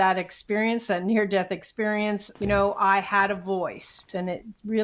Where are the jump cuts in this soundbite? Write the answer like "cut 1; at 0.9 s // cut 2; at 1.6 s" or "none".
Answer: cut 1; at 2.3 s // cut 2; at 4.0 s